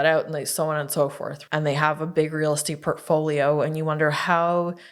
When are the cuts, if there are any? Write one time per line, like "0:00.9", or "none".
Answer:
0:01.3